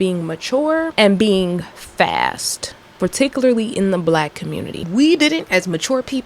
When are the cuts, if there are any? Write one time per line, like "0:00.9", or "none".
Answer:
0:00.9
0:04.9

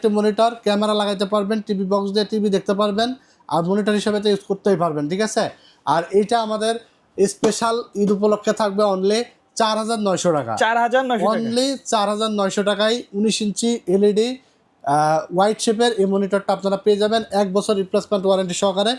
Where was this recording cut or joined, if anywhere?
none

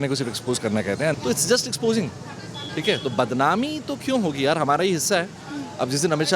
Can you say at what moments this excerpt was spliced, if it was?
0:01.2

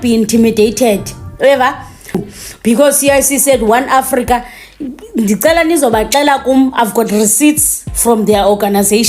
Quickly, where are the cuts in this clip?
0:02.2

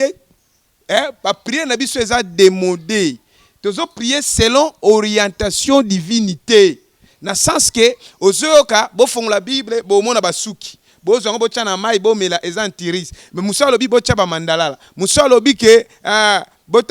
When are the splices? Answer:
none

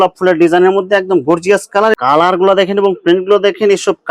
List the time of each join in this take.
0:02.0

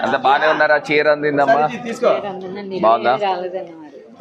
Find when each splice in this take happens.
none

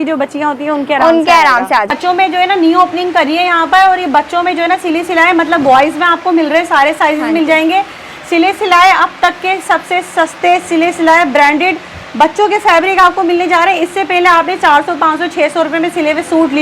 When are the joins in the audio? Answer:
0:01.9

